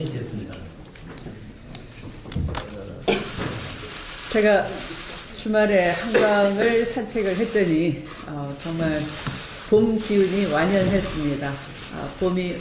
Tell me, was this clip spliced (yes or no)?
no